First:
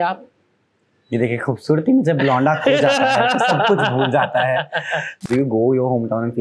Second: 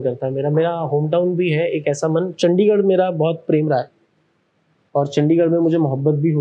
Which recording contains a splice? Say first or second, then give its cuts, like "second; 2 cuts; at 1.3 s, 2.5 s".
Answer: first; 1 cut; at 5.2 s